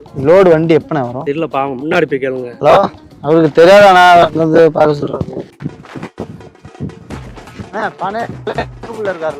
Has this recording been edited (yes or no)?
yes